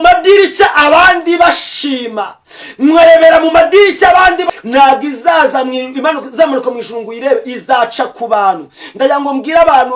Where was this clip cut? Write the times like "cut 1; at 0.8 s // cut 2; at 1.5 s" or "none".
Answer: cut 1; at 4.4 s